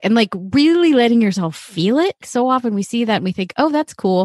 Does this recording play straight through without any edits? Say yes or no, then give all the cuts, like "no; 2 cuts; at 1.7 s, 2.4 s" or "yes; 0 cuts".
no; 1 cut; at 2.2 s